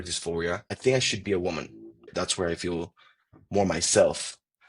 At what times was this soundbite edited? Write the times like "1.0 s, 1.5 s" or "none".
0.7 s, 2.1 s